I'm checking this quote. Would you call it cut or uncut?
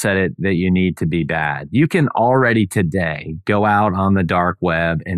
uncut